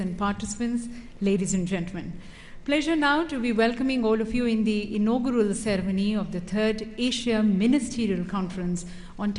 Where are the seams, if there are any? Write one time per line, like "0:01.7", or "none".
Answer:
0:01.9